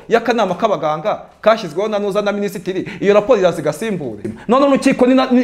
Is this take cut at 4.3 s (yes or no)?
yes